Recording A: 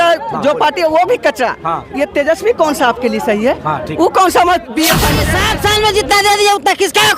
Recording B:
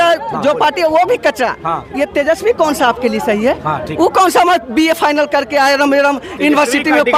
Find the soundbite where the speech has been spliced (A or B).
A